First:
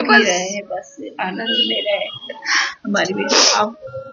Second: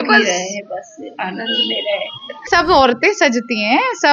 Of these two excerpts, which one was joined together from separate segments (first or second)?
second